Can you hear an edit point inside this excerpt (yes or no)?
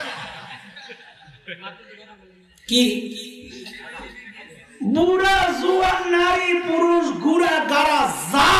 no